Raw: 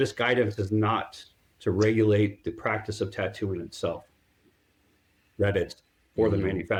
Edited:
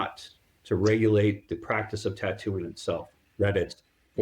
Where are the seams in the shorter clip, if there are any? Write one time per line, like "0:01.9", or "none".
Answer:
0:03.2